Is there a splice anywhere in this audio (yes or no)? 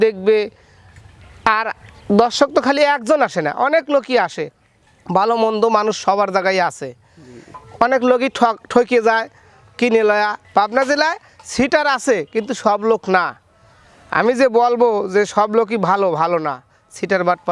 yes